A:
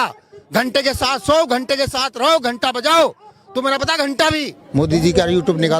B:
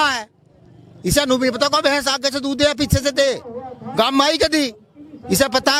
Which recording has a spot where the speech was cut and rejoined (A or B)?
A